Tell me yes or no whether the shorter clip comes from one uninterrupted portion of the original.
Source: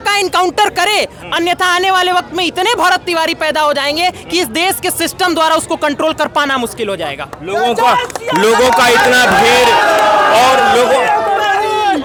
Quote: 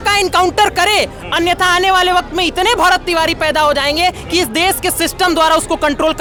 yes